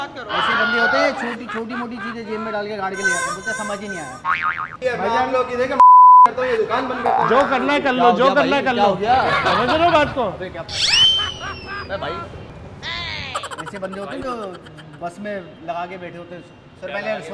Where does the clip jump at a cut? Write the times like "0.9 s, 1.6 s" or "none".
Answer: 4.6 s, 13.3 s